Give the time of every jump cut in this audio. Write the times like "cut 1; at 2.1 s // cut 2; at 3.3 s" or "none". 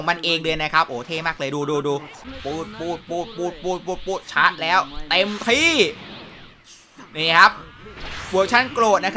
cut 1; at 2.2 s